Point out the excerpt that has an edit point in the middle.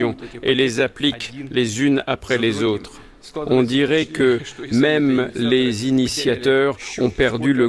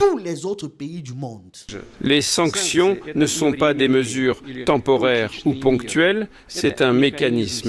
second; 1 cut; at 1.7 s

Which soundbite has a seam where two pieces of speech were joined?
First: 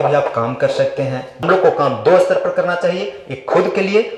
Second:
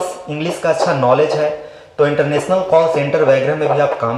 first; 1 cut; at 1.4 s

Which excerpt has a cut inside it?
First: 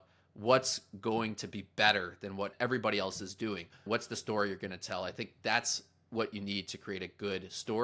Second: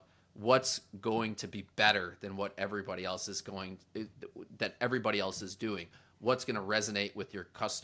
first; 2 cuts; at 2.5 s, 3.8 s

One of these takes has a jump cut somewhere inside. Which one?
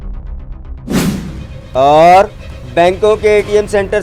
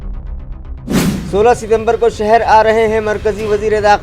second; 1 cut; at 1.1 s

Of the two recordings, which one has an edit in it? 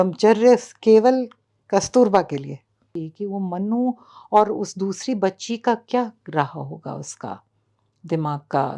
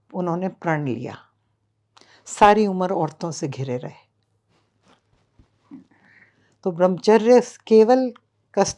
first; 1 cut; at 3.0 s

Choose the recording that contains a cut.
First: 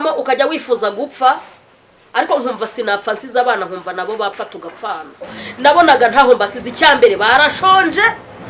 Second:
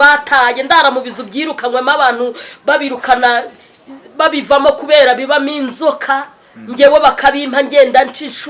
first; 1 cut; at 5.4 s

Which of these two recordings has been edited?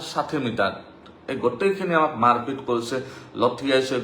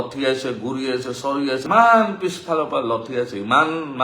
second; 1 cut; at 1.6 s

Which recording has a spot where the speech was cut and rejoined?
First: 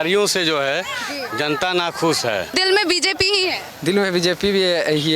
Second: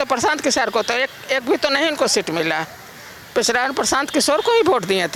first; 1 cut; at 2.5 s

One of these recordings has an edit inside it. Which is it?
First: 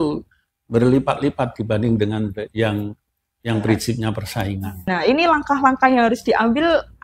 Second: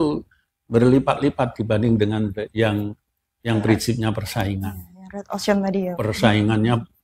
first; 1 cut; at 4.9 s

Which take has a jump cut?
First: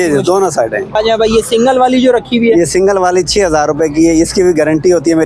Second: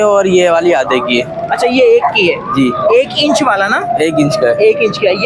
first; 1 cut; at 0.9 s

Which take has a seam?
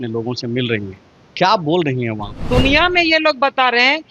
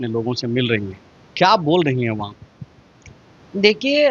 first; 1 cut; at 2.4 s

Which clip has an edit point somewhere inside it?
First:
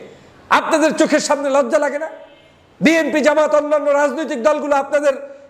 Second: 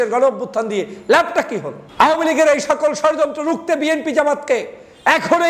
second; 1 cut; at 1.8 s

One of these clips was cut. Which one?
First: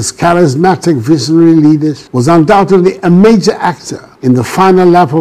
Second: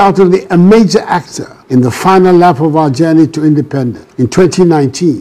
second; 1 cut; at 4.0 s

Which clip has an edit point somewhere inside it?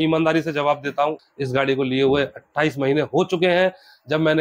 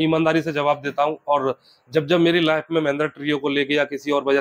first; 1 cut; at 1.2 s

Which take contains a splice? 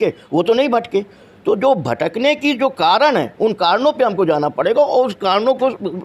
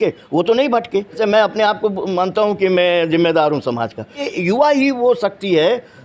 second; 2 cuts; at 1.2 s, 4.2 s

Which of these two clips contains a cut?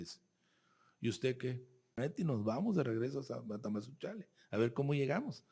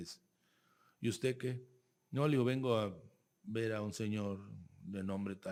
first; 1 cut; at 2.0 s

